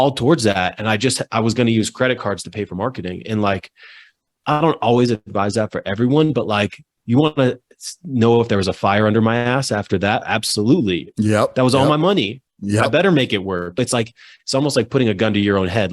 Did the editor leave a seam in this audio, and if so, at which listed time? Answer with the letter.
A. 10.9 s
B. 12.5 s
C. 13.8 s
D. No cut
C